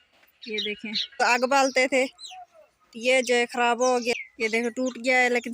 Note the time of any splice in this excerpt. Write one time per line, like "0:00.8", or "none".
0:01.2
0:04.1

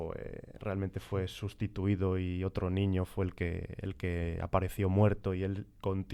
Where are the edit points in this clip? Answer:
none

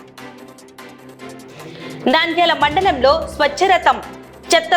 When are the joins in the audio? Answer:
0:01.5

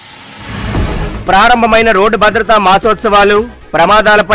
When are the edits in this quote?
0:00.9

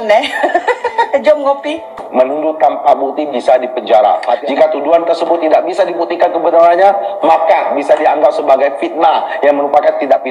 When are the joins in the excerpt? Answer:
0:01.9

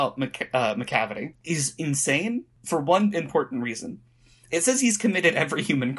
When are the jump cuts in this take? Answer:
0:01.3
0:02.5

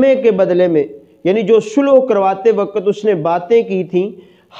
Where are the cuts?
none

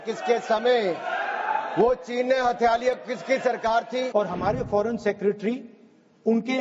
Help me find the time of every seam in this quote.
0:04.1

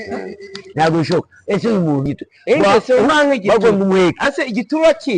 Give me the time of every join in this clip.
0:02.0

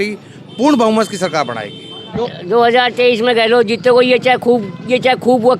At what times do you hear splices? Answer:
0:02.3

